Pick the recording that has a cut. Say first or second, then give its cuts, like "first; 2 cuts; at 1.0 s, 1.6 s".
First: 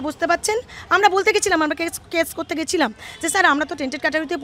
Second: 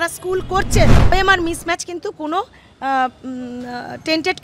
second; 1 cut; at 1.1 s